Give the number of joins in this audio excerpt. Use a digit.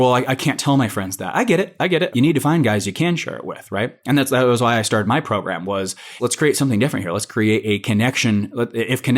2